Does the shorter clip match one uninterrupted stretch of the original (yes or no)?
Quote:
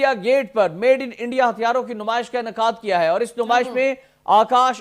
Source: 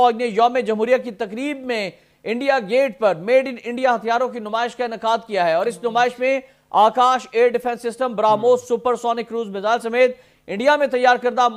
yes